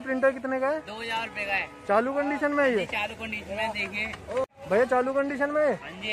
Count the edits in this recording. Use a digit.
1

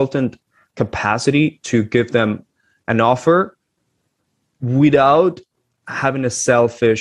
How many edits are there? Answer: 0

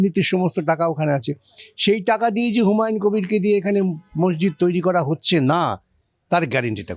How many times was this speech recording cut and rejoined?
0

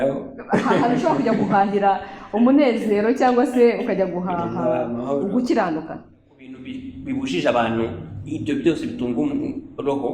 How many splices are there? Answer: 1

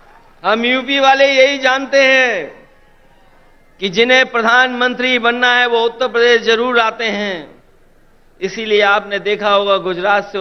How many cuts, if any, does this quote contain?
0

